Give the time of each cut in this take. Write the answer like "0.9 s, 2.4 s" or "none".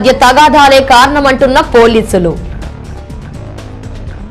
2.4 s